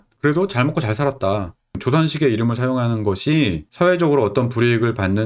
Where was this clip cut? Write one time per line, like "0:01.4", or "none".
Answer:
none